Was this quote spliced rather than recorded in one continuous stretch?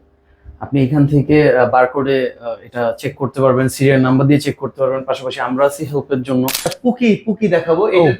yes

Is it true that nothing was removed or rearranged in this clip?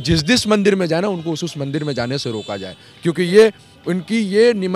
yes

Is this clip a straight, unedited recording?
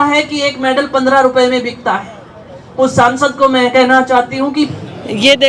no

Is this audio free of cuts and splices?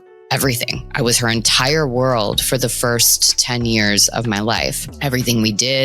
no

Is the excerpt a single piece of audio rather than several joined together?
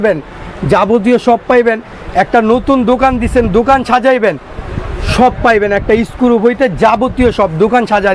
yes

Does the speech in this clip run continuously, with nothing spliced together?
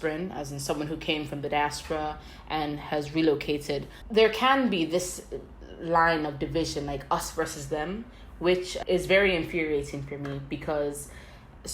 no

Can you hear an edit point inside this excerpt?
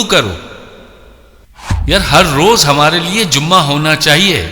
yes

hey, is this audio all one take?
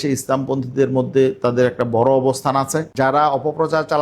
no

